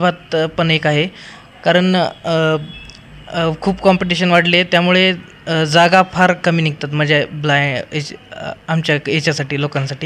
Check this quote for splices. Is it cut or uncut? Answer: uncut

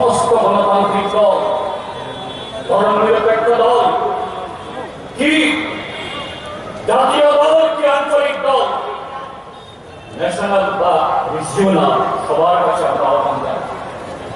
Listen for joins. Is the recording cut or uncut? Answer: cut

